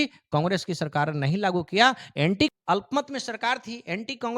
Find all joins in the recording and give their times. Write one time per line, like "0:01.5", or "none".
0:02.5